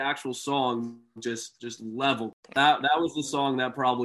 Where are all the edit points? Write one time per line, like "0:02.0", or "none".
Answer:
0:02.5